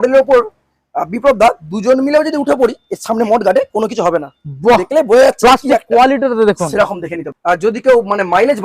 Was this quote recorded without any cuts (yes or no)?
no